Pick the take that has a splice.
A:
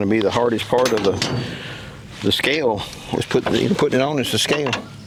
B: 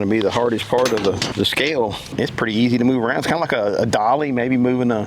B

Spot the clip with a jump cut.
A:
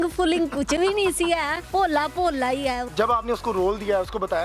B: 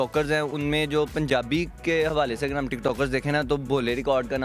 A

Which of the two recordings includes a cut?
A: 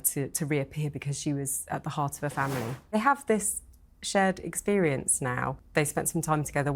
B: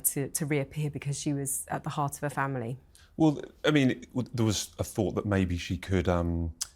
A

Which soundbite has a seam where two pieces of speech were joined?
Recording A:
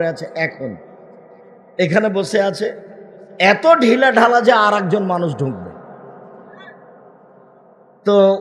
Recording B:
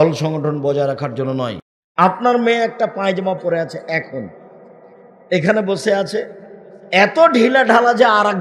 B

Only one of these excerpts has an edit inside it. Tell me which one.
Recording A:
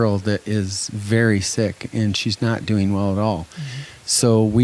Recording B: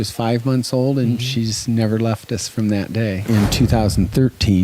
B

